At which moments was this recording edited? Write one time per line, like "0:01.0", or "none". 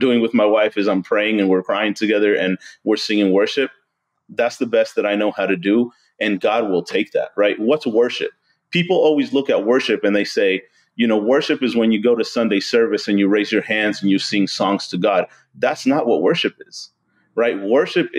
none